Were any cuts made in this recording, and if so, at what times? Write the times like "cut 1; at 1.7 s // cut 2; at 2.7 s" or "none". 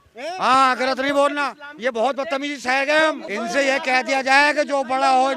cut 1; at 3.2 s